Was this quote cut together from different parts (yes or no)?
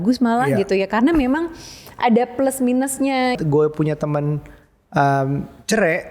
yes